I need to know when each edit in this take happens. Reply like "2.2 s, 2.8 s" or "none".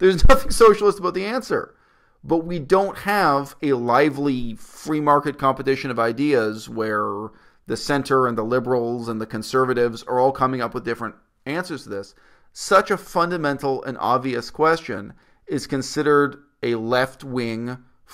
none

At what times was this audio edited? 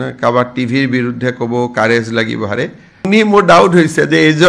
3.1 s

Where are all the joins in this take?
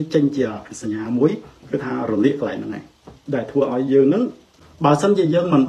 4.0 s

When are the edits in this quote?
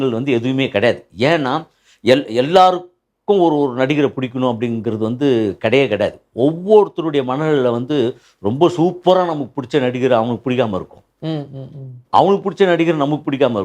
none

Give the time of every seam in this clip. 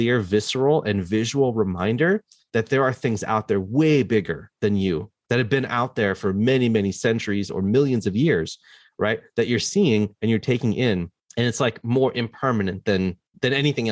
none

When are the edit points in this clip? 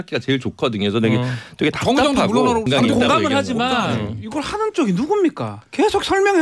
2.7 s

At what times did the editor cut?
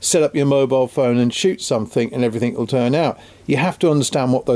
none

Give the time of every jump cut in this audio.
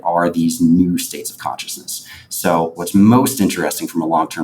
2.8 s

